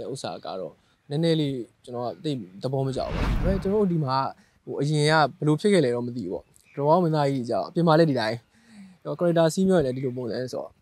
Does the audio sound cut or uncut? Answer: cut